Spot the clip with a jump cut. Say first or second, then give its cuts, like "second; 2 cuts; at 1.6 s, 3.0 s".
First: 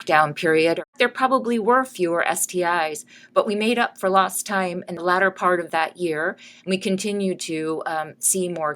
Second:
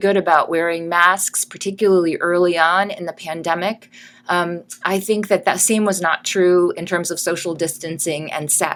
first; 2 cuts; at 0.9 s, 4.9 s